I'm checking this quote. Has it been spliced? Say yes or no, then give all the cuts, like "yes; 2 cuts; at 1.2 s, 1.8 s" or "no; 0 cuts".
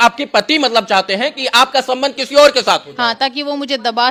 no; 0 cuts